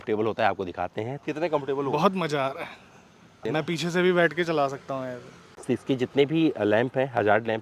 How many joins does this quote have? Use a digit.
3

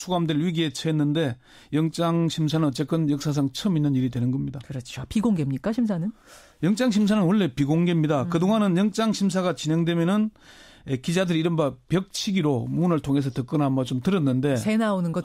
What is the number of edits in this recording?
1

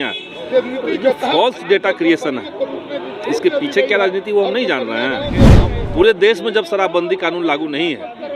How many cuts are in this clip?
1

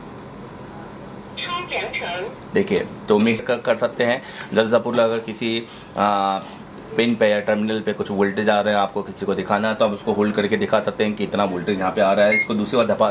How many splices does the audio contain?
1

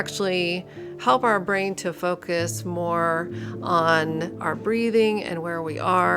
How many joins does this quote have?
1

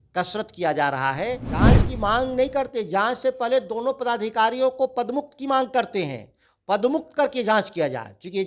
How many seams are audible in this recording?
1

